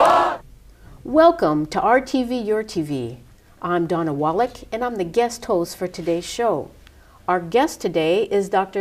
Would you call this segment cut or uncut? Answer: uncut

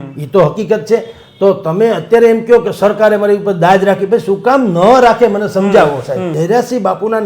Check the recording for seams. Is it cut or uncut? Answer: cut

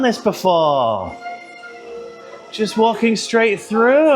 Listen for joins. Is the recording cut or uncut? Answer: uncut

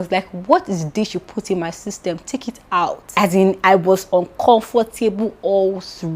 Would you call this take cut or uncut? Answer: cut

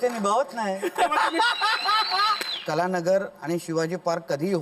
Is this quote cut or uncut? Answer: cut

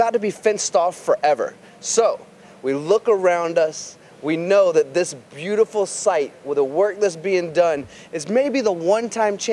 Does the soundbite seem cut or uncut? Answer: cut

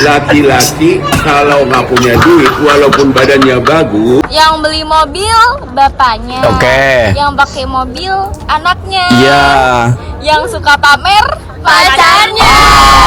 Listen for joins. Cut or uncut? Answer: cut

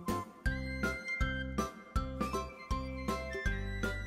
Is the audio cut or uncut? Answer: uncut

